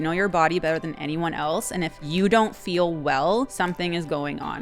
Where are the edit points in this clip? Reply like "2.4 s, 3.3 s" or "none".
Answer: 2.0 s, 3.5 s